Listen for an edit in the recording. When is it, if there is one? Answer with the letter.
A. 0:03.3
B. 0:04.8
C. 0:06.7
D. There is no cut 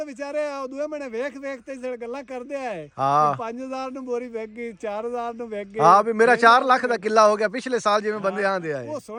D